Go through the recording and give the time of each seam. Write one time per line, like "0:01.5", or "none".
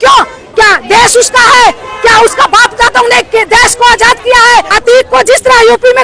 0:04.7